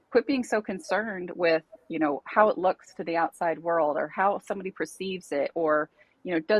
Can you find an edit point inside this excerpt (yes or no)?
no